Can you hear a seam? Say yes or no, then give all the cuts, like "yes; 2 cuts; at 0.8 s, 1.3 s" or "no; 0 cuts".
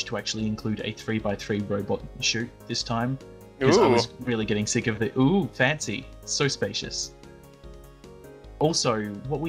no; 0 cuts